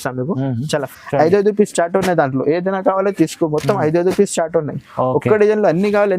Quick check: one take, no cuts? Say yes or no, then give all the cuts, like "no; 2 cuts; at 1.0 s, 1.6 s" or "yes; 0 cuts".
no; 1 cut; at 0.9 s